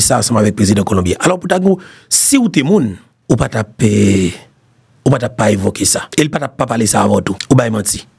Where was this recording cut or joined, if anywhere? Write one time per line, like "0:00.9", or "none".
0:03.1
0:06.0
0:07.4